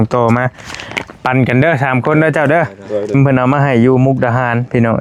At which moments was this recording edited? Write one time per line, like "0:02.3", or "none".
0:03.1